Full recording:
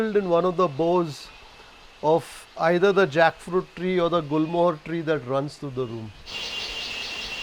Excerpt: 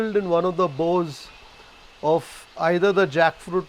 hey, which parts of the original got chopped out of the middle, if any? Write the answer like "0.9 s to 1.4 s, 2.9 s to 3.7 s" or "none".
none